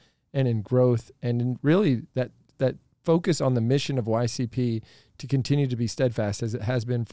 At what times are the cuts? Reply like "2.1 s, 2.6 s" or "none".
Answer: none